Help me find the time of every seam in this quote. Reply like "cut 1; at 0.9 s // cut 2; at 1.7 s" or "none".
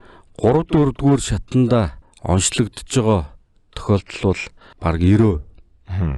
cut 1; at 2.1 s

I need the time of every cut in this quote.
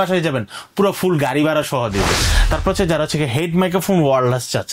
cut 1; at 2.2 s

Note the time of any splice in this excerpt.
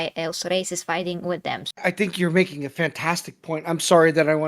cut 1; at 1.7 s

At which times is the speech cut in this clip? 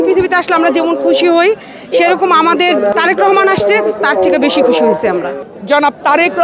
cut 1; at 2.9 s // cut 2; at 5.4 s

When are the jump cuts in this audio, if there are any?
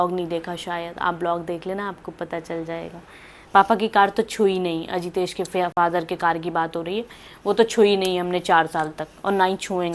none

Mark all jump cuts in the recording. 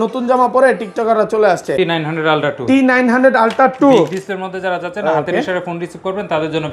cut 1; at 1.8 s

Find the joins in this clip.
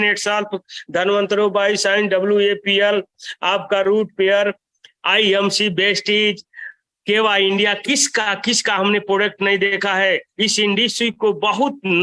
none

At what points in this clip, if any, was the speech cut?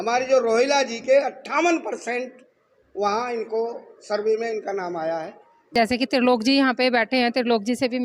cut 1; at 5.7 s

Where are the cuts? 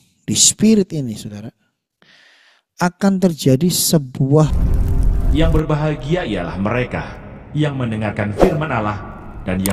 cut 1; at 4.7 s

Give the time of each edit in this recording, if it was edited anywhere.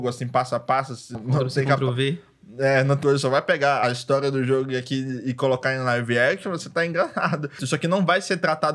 cut 1; at 1.1 s // cut 2; at 3.0 s // cut 3; at 7.6 s

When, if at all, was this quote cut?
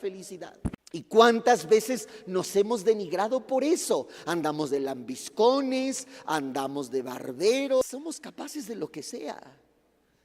cut 1; at 0.8 s // cut 2; at 7.8 s

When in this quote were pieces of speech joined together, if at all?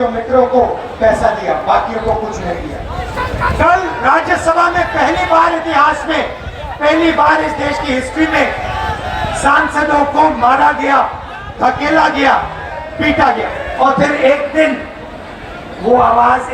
cut 1; at 3.0 s // cut 2; at 13.7 s

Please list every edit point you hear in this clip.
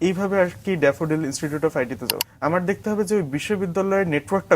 cut 1; at 2.1 s

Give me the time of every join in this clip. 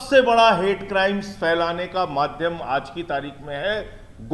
none

